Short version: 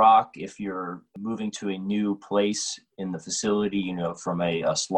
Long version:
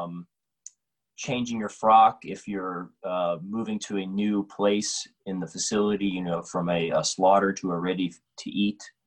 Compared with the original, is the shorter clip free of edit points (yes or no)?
no